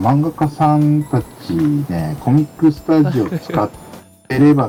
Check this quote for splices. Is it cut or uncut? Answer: uncut